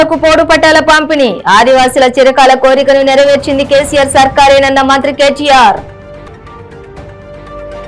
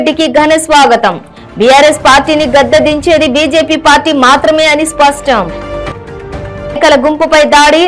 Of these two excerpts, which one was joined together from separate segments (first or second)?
second